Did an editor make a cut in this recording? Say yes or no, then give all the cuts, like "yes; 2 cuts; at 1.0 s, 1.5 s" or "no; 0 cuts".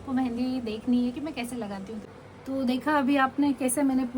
yes; 1 cut; at 2.1 s